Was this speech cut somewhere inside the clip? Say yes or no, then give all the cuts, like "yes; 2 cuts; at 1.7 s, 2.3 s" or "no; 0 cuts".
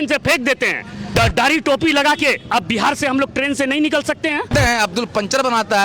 yes; 2 cuts; at 1.1 s, 4.5 s